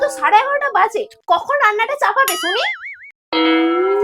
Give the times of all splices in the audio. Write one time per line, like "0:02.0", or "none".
0:02.9